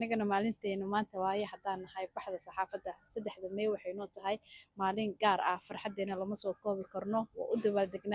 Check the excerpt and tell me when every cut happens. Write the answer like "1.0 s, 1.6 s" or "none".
none

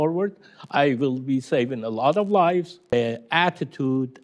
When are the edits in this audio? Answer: 2.8 s

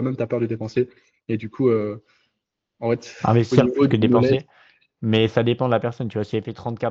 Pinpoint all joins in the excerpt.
none

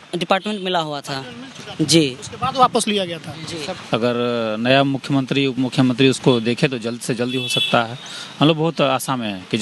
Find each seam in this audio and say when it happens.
3.7 s

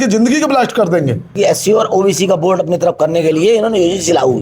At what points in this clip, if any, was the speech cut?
1.4 s

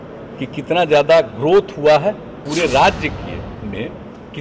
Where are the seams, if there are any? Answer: 2.4 s

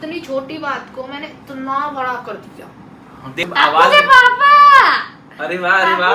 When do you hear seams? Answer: 3.4 s

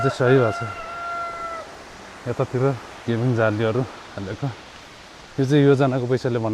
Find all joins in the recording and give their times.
none

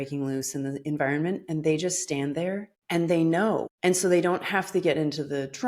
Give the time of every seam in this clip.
2.7 s, 3.7 s

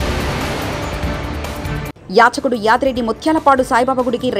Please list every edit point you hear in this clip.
1.9 s

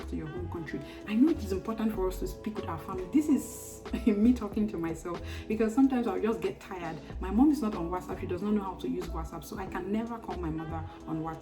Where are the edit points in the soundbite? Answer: 1.0 s

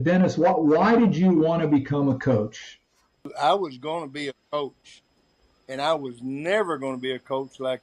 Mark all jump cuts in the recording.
3.3 s

